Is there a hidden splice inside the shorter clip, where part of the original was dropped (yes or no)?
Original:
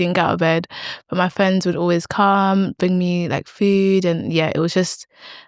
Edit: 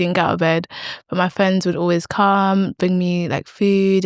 no